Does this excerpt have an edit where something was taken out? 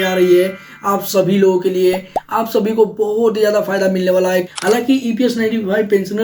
yes; 1 cut; at 4.5 s

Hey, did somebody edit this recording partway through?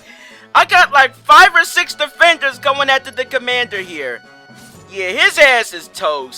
no; 0 cuts

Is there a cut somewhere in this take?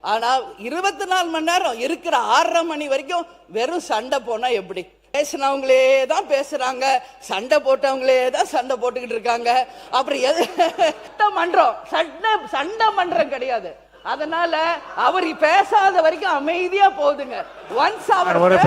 yes; 2 cuts; at 5.1 s, 11.1 s

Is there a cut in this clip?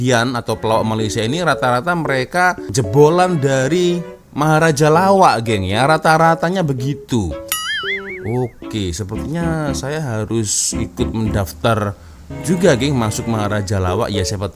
no; 0 cuts

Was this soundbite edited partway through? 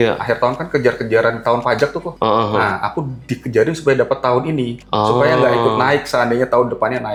no; 0 cuts

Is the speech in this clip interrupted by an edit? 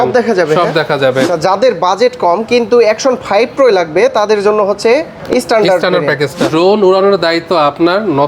yes; 2 cuts; at 1.3 s, 6.4 s

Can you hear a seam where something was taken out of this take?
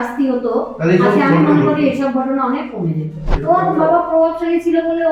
yes; 1 cut; at 3.3 s

